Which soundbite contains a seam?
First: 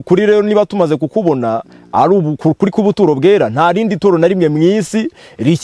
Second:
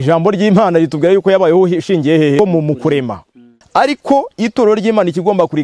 second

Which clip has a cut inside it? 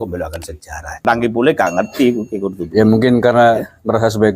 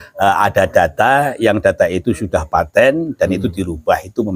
first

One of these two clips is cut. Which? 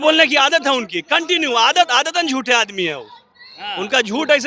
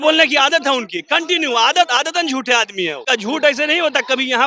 second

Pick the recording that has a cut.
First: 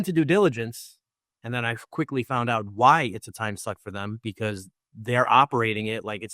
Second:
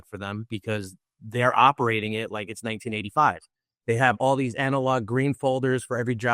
second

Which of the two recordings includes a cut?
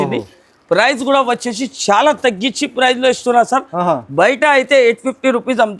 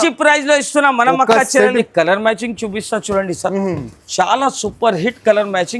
second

